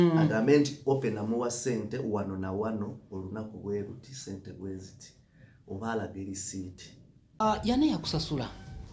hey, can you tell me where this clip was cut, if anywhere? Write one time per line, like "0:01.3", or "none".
0:07.4